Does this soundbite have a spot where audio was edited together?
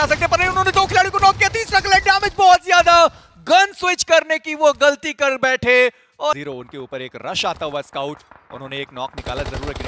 no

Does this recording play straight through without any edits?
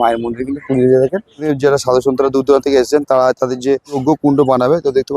no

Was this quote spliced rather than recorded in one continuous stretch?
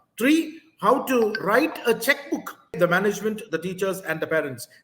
yes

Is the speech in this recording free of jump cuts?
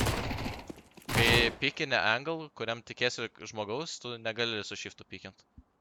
yes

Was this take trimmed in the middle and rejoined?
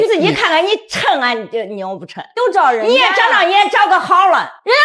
no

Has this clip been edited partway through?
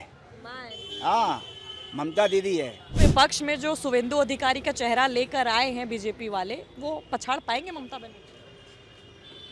yes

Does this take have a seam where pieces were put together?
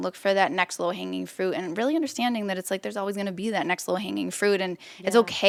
no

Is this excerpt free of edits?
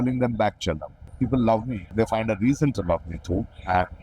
no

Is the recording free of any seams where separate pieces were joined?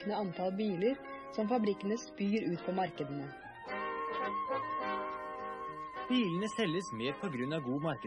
no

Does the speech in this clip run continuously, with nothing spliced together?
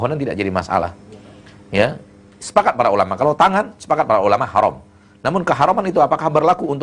yes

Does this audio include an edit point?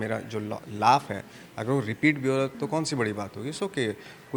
no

